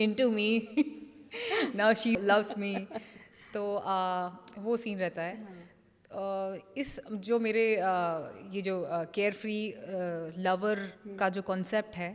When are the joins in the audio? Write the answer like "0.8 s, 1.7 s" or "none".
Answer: none

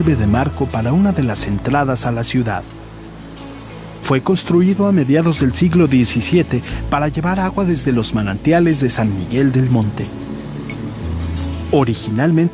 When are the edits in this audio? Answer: 7.4 s

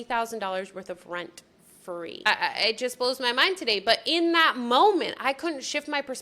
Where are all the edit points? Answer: 2.3 s

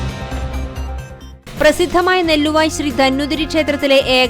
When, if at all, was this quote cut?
1.2 s

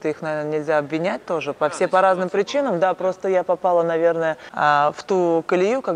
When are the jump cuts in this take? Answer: 4.5 s

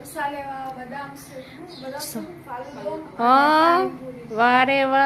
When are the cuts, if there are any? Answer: none

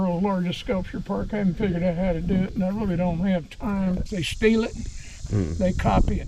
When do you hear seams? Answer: 4.2 s

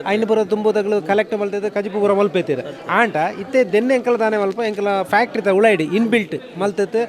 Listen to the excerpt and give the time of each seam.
none

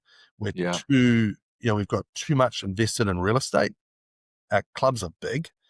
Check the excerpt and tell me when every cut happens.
none

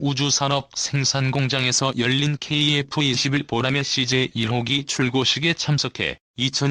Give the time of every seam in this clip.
5.8 s

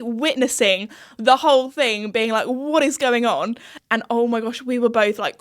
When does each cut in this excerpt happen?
3.7 s

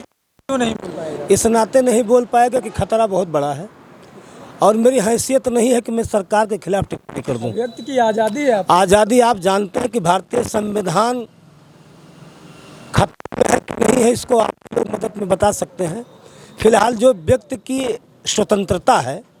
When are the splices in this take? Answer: none

